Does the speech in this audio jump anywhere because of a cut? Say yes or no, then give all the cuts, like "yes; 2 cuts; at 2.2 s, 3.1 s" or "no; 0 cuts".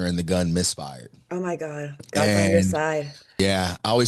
no; 0 cuts